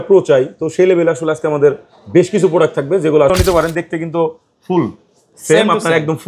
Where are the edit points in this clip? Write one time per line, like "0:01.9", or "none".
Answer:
0:03.3